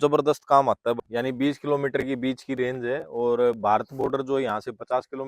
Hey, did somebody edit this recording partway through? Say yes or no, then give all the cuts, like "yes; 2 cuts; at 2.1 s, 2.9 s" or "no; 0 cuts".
yes; 1 cut; at 1.0 s